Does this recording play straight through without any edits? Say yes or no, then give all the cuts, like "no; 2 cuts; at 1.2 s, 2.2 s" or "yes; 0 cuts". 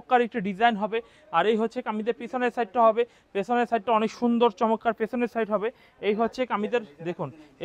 yes; 0 cuts